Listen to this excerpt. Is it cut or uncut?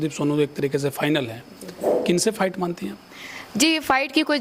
uncut